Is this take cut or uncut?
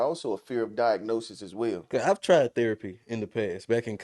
cut